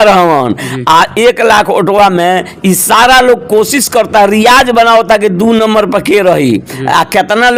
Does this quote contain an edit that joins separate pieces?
no; 0 cuts

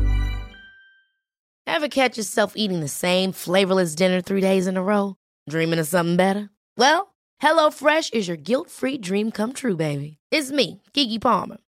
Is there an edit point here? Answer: yes; 1 cut; at 1.5 s

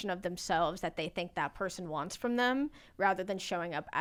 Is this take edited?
no; 0 cuts

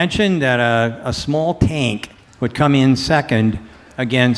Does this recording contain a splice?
no; 0 cuts

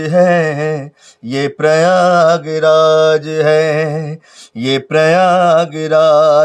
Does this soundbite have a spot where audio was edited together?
no; 0 cuts

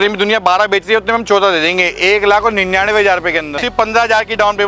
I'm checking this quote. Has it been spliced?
yes; 1 cut; at 3.6 s

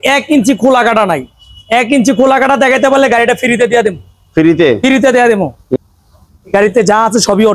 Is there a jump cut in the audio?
yes; 1 cut; at 5.6 s

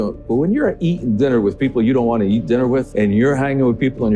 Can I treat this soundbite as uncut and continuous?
no; 1 cut; at 2.9 s

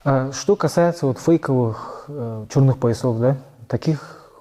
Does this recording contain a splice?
no; 0 cuts

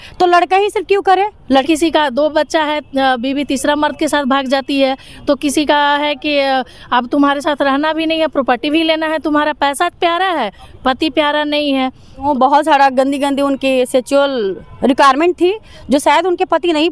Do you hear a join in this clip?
yes; 2 cuts; at 1.6 s, 12.2 s

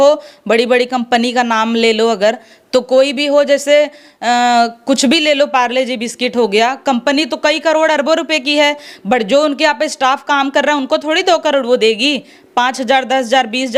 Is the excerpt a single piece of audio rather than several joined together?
yes; 0 cuts

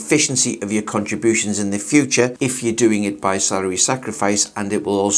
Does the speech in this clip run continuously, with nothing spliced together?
yes; 0 cuts

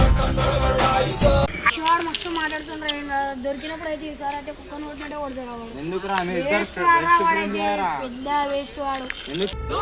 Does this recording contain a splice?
yes; 1 cut; at 1.7 s

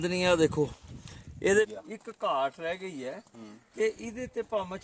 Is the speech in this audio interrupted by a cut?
yes; 1 cut; at 1.7 s

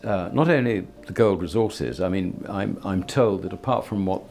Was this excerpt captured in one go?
yes; 0 cuts

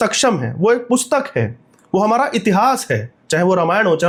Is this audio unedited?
yes; 0 cuts

